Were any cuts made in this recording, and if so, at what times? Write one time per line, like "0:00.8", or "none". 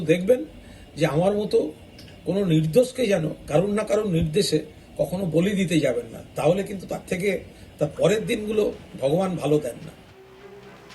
0:10.0